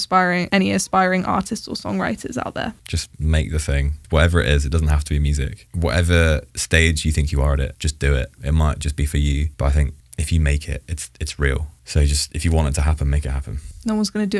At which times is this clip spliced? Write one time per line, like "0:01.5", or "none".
none

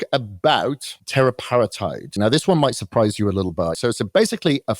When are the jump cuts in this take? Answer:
0:00.9
0:02.2
0:03.8

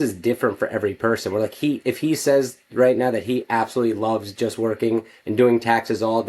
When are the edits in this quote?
none

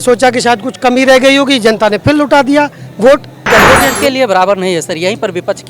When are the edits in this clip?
0:03.5

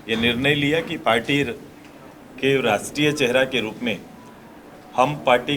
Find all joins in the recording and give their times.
none

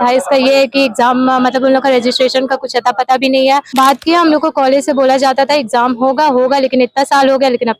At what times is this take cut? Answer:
0:03.7

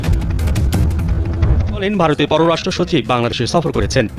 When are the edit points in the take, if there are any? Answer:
0:01.8

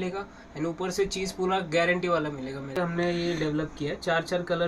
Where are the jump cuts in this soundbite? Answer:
0:02.8

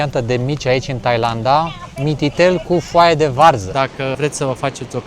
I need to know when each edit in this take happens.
0:04.1

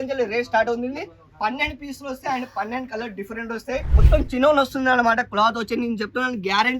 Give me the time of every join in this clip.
0:04.0

